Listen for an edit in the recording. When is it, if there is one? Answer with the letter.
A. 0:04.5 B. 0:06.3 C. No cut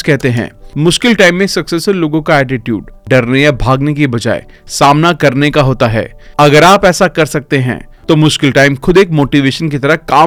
C